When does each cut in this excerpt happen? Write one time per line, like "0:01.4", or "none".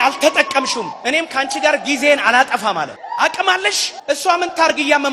0:00.9
0:03.0
0:03.9